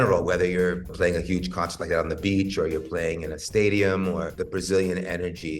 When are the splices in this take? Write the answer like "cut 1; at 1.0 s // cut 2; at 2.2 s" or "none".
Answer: cut 1; at 0.9 s // cut 2; at 4.4 s